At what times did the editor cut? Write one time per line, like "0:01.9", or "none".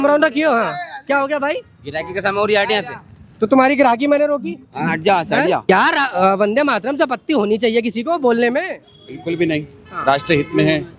0:05.6